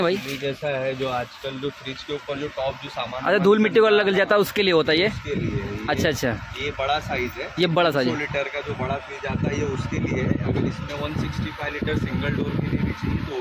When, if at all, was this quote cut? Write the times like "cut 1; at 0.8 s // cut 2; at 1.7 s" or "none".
none